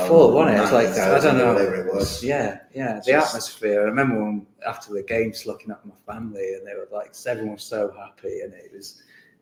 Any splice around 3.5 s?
no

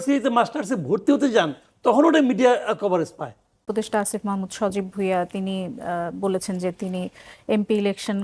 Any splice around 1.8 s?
no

